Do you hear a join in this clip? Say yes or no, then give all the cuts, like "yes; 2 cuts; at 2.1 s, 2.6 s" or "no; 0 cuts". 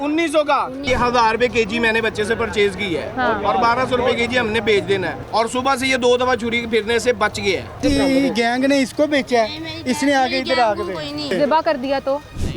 yes; 4 cuts; at 0.8 s, 5.1 s, 7.8 s, 11.3 s